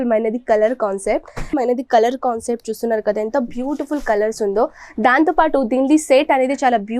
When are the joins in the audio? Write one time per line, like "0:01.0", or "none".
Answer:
0:01.5